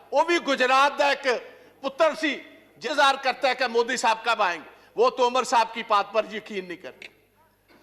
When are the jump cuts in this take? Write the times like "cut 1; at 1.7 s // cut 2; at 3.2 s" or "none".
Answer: cut 1; at 2.8 s